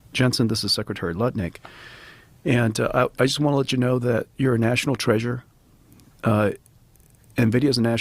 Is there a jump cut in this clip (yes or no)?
no